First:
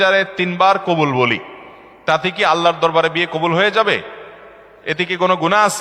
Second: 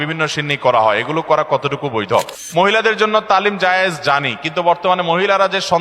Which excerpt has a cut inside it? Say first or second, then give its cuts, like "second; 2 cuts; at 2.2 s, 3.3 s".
second; 1 cut; at 2.4 s